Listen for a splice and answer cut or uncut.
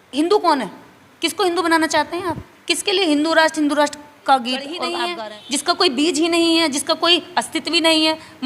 cut